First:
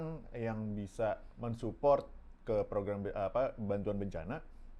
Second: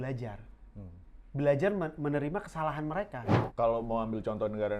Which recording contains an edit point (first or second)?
second